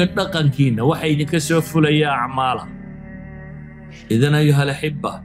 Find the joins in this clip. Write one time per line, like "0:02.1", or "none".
0:02.6
0:04.0